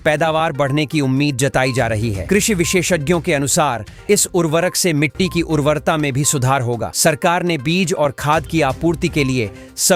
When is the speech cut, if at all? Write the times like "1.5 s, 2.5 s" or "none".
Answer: none